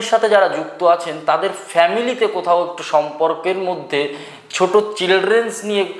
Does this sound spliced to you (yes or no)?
no